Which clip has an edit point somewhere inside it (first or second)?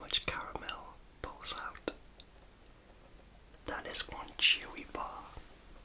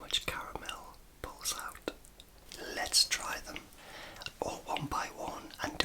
second